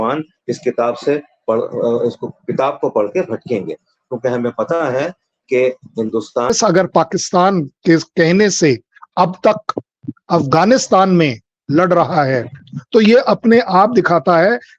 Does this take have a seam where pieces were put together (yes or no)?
yes